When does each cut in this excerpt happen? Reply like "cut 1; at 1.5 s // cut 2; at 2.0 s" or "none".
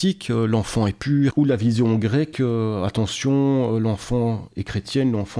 cut 1; at 1.3 s